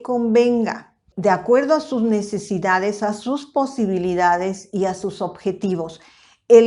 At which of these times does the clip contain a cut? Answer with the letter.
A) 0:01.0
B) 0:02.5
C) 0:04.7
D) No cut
A